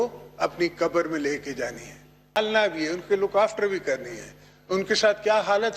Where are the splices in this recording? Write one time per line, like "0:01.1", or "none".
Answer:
0:02.4